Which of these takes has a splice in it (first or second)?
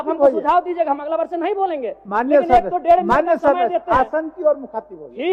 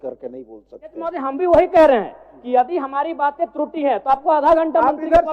second